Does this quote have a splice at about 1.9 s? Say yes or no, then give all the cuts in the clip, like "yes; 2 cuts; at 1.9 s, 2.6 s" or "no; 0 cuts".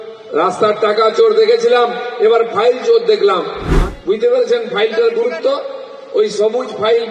no; 1 cut; at 3.6 s